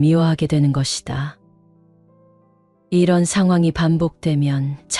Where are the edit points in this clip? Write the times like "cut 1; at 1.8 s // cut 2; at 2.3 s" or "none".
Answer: cut 1; at 1.4 s // cut 2; at 2.9 s